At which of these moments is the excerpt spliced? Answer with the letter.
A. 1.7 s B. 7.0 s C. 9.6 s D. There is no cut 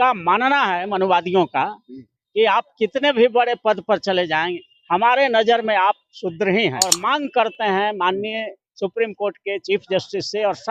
B